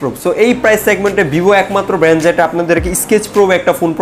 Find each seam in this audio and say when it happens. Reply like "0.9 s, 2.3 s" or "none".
none